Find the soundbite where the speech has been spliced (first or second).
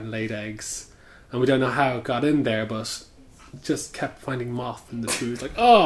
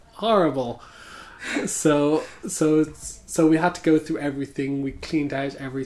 first